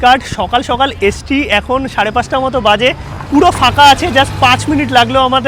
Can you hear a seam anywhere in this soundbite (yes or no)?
no